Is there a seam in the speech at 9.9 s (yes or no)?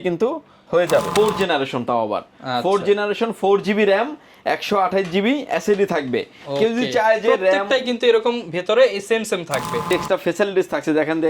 yes